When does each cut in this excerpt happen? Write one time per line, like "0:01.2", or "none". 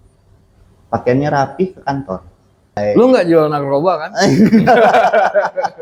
0:02.8